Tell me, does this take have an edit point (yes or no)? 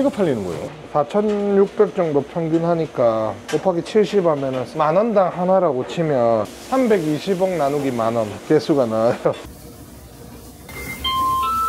yes